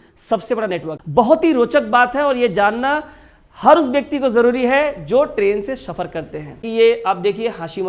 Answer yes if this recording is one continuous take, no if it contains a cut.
no